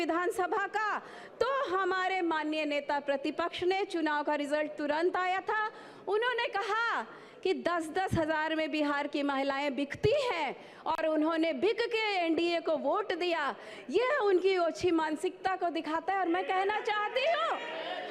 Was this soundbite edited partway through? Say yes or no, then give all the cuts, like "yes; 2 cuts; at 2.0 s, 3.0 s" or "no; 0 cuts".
no; 0 cuts